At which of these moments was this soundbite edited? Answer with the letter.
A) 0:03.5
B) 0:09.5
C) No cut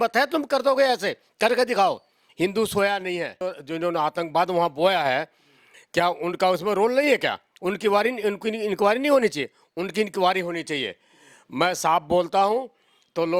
A